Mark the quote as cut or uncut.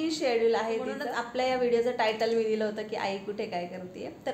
cut